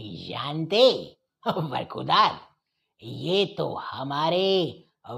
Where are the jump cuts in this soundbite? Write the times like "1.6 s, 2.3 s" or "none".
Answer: none